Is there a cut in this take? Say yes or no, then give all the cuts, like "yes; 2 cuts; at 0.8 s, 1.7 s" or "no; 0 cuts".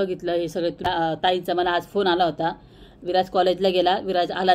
yes; 1 cut; at 0.9 s